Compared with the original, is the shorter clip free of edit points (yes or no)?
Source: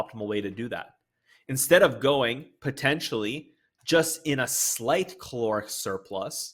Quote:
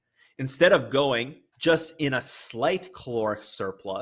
no